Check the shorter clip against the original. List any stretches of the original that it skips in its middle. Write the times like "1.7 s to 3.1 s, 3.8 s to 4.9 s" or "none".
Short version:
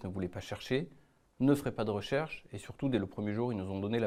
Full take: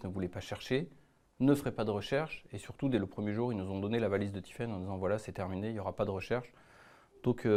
none